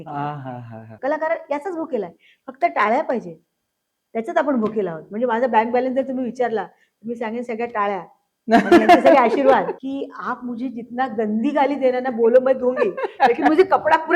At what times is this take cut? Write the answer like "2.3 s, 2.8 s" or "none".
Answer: 0.9 s, 9.8 s